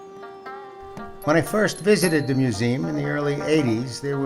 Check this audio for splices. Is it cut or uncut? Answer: cut